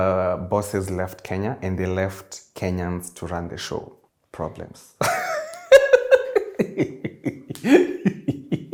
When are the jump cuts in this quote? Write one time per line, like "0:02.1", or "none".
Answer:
none